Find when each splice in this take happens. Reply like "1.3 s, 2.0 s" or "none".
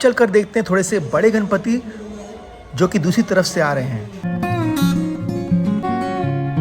4.3 s, 5.8 s